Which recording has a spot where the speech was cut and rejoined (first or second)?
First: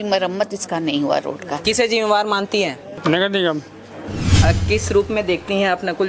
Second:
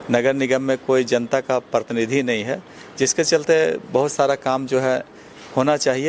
first